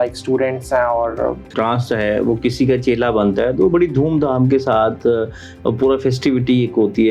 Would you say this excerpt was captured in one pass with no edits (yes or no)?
no